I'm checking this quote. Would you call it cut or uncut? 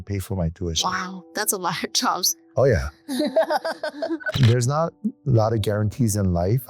cut